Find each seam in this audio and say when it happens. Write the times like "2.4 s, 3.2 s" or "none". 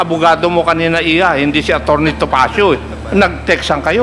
2.9 s